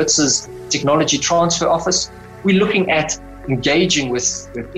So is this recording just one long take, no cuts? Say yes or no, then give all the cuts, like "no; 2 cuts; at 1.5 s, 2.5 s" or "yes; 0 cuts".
yes; 0 cuts